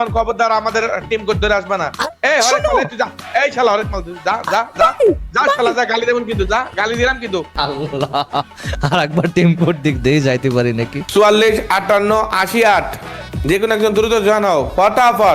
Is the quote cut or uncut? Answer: cut